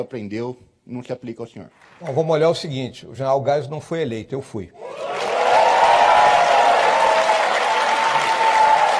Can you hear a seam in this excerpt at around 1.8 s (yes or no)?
yes